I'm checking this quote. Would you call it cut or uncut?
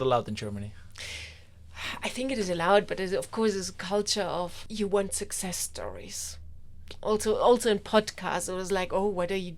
uncut